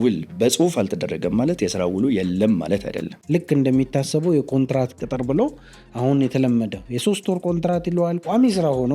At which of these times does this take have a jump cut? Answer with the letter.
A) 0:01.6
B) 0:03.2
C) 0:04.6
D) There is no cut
B